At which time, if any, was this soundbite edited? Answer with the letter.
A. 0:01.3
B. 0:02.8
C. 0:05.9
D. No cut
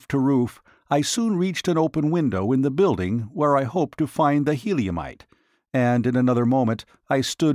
C